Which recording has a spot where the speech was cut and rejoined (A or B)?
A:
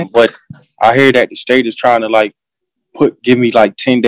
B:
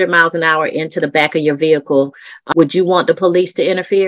B